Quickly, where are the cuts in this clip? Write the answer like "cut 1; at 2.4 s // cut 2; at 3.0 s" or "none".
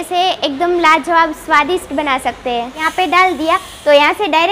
cut 1; at 2.8 s